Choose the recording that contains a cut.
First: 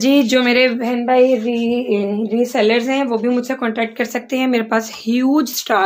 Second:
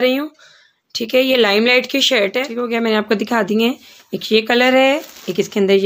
second; 1 cut; at 2.6 s

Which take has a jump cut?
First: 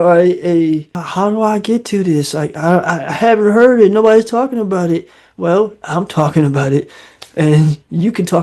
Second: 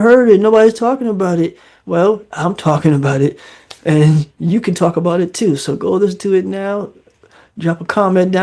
first; 1 cut; at 1.0 s

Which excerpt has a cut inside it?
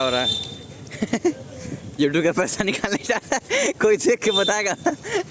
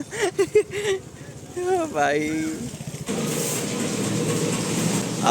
second; 1 cut; at 3.1 s

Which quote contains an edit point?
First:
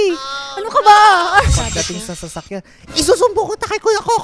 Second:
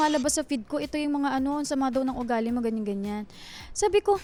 first; 1 cut; at 1.6 s

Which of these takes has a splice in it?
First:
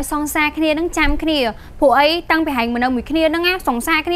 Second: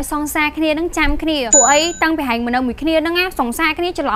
second; 1 cut; at 1.5 s

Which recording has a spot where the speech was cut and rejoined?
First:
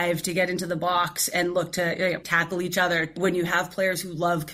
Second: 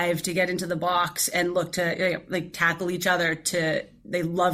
first; 2 cuts; at 2.2 s, 3.2 s

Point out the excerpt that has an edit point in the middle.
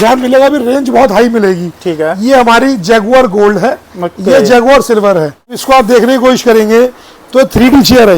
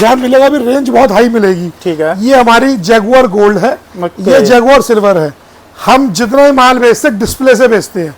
first; 1 cut; at 5.6 s

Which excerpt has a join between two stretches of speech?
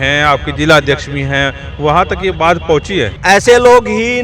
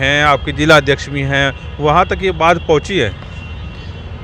first; 1 cut; at 3.1 s

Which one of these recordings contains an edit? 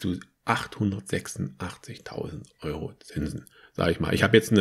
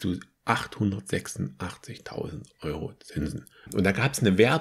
second; 1 cut; at 3.6 s

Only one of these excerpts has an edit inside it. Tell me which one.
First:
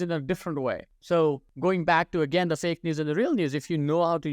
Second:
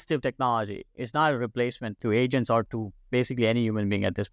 first; 2 cuts; at 0.9 s, 1.5 s

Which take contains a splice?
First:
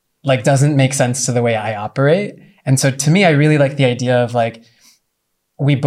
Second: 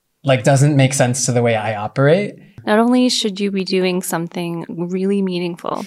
second; 1 cut; at 2.5 s

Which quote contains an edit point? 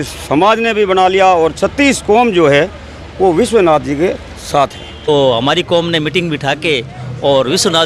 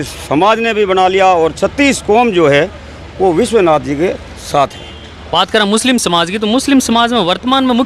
first; 1 cut; at 4.9 s

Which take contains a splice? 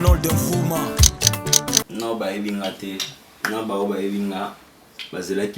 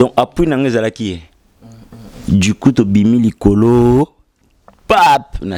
first; 1 cut; at 1.8 s

